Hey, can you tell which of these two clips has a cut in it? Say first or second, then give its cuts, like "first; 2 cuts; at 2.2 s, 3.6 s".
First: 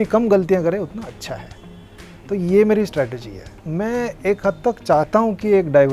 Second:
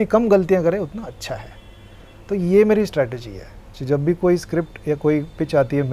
first; 1 cut; at 3.6 s